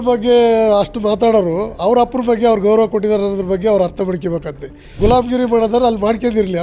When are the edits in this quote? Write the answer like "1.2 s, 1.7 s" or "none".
5.0 s